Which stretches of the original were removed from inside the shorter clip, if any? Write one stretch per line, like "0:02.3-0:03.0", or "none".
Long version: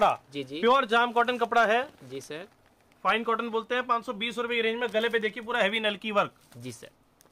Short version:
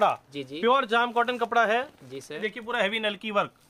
0:02.4-0:05.2